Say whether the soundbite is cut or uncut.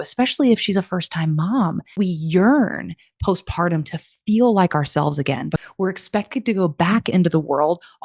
cut